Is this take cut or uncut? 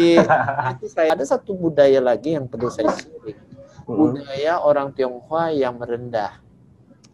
cut